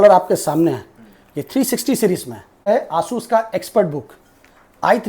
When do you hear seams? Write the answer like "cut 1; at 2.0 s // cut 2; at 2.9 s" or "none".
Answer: cut 1; at 2.7 s